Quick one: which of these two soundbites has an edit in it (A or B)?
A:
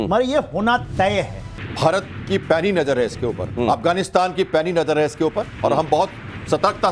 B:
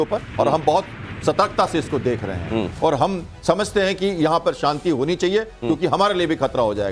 A